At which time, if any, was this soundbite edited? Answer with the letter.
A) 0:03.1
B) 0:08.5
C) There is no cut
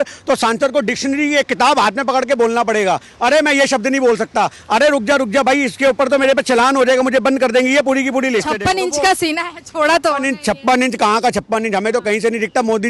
B